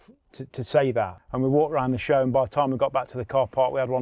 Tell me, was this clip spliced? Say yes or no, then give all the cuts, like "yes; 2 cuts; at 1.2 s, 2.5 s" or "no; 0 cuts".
yes; 1 cut; at 1.2 s